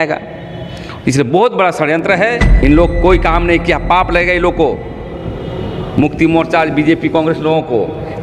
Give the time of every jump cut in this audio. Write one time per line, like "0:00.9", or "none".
0:02.6